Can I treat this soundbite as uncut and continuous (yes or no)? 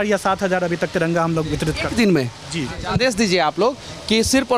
no